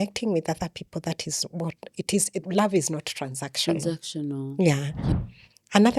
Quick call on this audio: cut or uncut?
cut